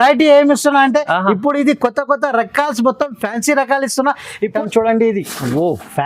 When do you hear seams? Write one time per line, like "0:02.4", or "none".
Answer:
0:04.4